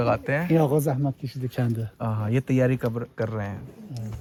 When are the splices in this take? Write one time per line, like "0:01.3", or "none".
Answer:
none

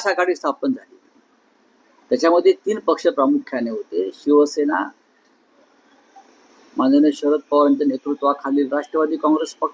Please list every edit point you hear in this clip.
none

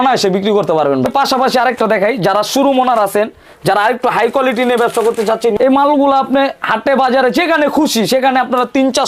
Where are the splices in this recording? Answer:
0:01.1
0:05.6

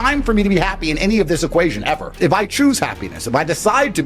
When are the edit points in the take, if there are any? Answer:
0:02.1

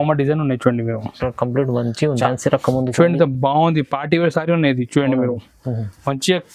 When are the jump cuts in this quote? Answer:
0:02.1

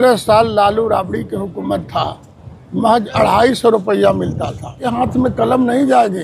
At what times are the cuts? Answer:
0:04.8

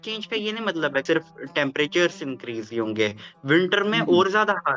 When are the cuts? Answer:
0:01.0

